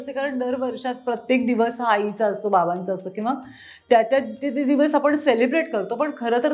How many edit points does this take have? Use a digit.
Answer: 0